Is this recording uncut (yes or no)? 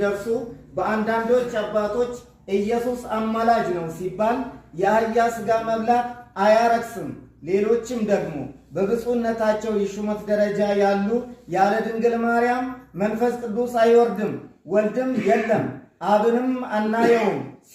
yes